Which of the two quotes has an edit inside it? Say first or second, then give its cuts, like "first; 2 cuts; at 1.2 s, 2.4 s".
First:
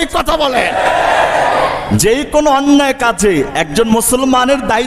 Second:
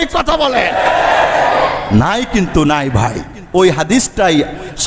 first; 1 cut; at 1.9 s